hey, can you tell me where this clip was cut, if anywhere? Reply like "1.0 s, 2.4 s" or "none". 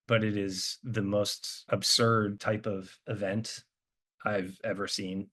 1.5 s, 2.4 s